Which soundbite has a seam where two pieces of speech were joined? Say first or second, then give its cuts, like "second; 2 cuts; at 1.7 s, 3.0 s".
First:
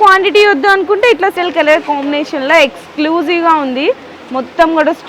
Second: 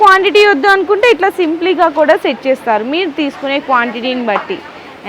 first; 1 cut; at 1.3 s